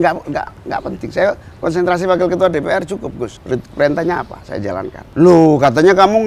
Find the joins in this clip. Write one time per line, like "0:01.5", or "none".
0:03.4
0:05.0